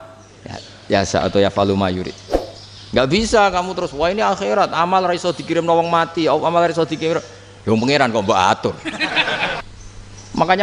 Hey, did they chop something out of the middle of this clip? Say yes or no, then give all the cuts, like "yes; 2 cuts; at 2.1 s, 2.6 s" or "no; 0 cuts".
yes; 1 cut; at 9.6 s